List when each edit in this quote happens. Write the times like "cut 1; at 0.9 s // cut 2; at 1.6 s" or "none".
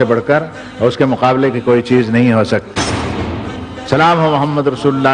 cut 1; at 3.3 s